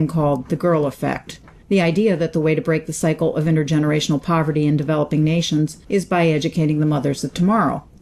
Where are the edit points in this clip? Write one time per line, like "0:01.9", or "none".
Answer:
none

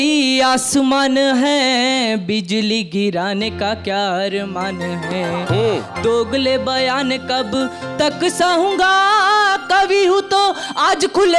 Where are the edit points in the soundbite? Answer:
none

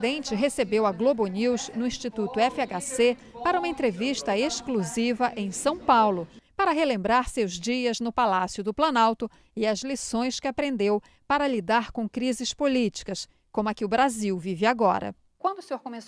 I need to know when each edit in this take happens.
0:05.9

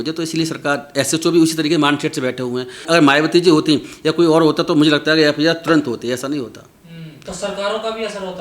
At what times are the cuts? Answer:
0:02.8

